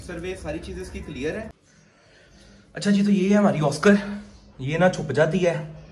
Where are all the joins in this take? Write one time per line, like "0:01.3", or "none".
0:01.6